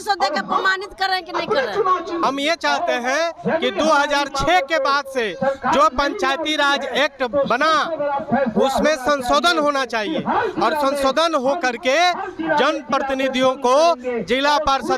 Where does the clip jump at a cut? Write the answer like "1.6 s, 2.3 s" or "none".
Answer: 2.2 s